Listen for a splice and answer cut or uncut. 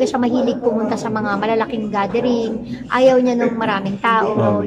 uncut